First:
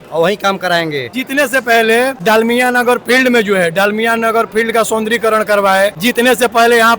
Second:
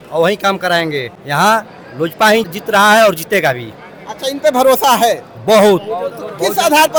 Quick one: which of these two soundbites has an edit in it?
first; 3 cuts; at 1.1 s, 2.2 s, 6.0 s

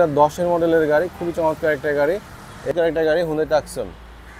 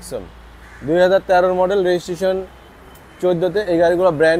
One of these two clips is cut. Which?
first; 1 cut; at 2.7 s

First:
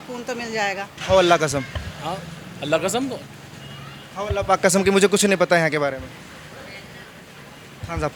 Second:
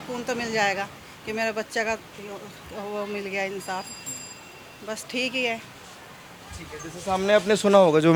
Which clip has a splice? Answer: first; 2 cuts; at 0.9 s, 7.2 s

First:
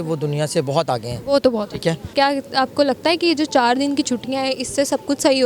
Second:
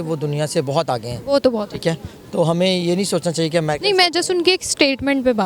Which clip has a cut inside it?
first; 1 cut; at 2.1 s

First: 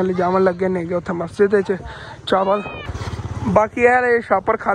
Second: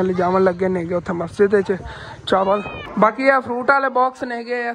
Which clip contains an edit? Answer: second; 1 cut; at 2.8 s

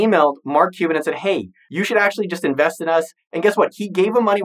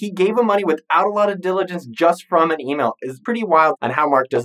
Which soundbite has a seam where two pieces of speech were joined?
second; 1 cut; at 3.4 s

